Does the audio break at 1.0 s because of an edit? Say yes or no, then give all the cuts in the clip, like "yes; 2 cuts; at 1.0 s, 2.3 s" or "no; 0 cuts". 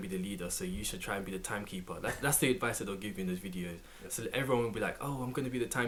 no; 0 cuts